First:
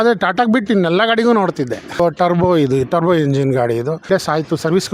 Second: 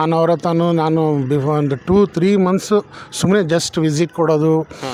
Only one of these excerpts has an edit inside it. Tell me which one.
first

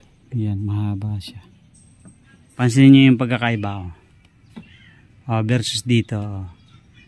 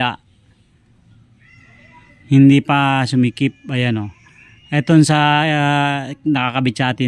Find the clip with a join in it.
first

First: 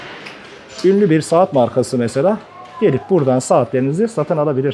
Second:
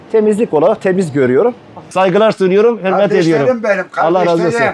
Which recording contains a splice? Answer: second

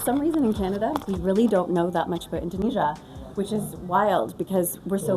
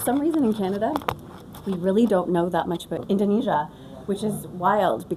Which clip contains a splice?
first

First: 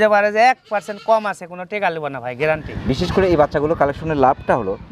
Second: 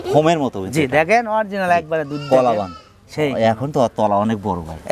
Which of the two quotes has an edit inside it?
first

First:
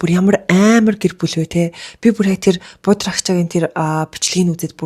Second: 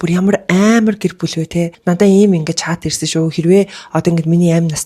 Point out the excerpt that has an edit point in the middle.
second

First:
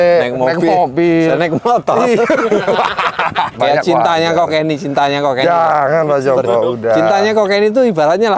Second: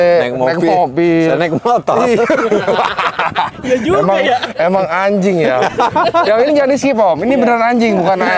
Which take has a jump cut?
first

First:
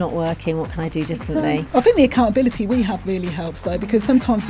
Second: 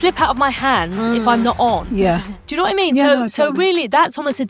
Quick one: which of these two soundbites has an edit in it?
first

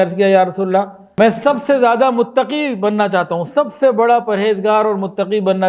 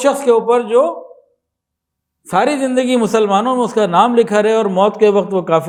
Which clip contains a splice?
first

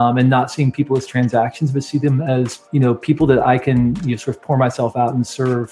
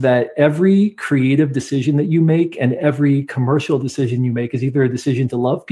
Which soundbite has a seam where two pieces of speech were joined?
first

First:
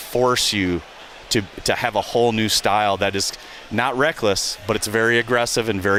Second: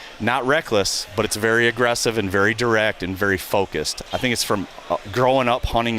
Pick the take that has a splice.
second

